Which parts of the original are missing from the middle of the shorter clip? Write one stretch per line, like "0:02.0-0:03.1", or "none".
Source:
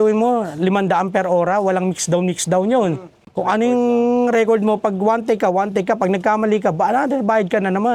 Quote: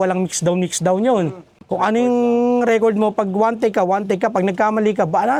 none